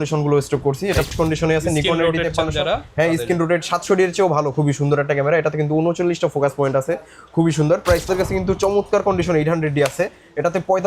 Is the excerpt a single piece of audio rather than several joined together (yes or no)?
no